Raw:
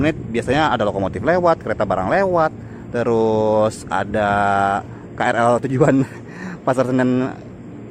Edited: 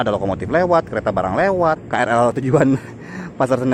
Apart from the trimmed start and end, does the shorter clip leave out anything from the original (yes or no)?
yes